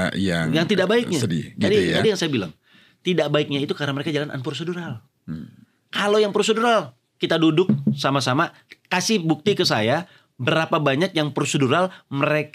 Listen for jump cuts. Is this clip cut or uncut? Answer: uncut